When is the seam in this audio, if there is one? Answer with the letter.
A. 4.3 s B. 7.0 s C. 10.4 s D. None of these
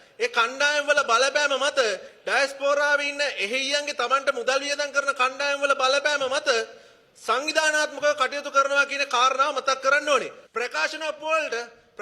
C